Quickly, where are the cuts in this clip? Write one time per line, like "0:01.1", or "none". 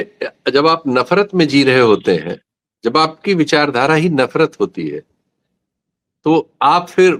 none